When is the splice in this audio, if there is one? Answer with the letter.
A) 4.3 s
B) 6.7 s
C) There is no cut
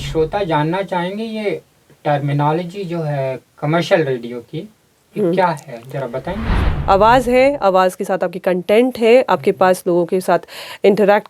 B